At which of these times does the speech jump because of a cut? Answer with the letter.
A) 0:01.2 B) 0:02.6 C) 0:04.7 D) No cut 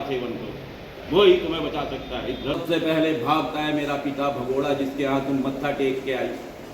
B